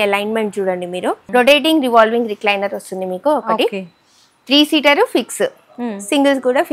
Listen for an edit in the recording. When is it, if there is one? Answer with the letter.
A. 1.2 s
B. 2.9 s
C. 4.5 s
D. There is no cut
A